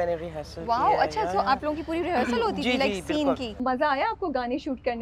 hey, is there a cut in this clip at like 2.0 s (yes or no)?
no